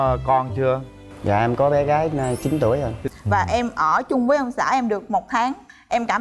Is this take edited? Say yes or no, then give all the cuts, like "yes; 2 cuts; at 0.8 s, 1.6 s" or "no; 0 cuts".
yes; 1 cut; at 3.0 s